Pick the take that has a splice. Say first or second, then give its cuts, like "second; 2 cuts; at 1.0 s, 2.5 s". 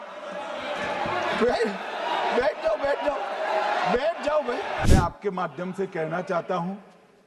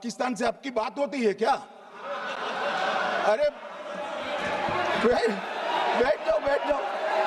first; 1 cut; at 4.8 s